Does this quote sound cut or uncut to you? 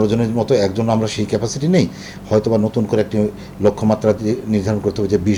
uncut